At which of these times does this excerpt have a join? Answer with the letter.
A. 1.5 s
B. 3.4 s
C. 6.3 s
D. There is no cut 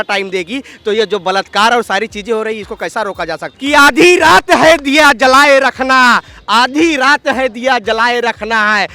B